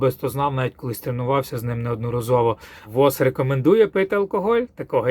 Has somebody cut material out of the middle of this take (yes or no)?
yes